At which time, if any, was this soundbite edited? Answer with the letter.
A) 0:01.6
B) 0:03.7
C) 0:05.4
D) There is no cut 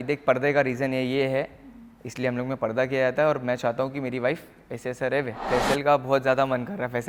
C